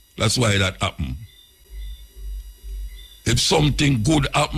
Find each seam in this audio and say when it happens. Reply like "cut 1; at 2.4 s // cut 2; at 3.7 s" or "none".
cut 1; at 1.6 s